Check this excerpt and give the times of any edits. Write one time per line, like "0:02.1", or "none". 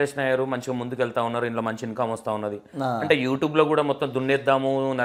none